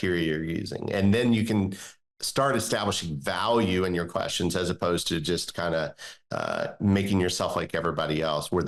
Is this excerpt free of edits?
yes; 0 cuts

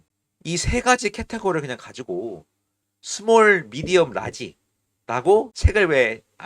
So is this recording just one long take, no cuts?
no; 1 cut; at 5.6 s

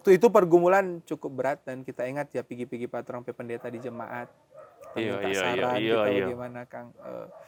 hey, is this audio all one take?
yes; 0 cuts

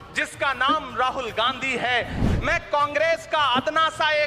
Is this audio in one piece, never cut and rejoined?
no; 1 cut; at 2.3 s

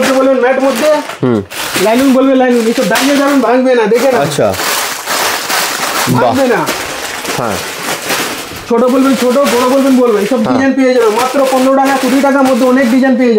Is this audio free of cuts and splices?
yes; 0 cuts

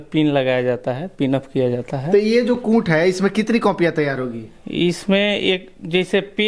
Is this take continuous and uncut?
yes; 0 cuts

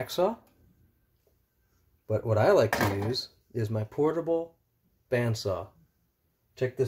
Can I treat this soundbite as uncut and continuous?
yes; 0 cuts

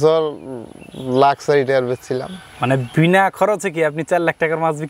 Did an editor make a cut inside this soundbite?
no; 0 cuts

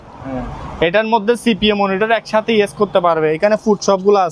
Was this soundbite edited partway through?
no; 0 cuts

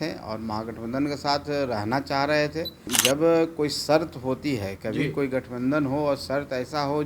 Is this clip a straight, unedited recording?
no; 1 cut; at 2.9 s

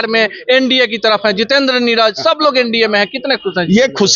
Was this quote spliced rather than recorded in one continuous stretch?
no; 0 cuts

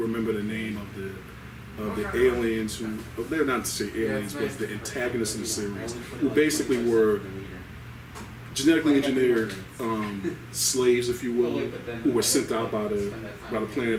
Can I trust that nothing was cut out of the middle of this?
yes; 0 cuts

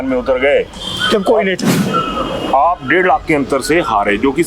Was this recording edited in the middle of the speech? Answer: yes; 1 cut; at 1.8 s

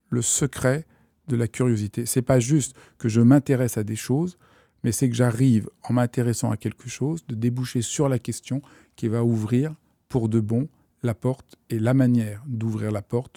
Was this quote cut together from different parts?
no; 0 cuts

